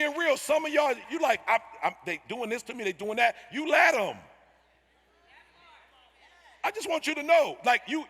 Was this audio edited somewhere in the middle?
yes; 1 cut; at 1.0 s

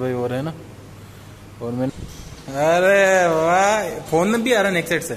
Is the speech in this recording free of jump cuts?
no; 1 cut; at 1.9 s

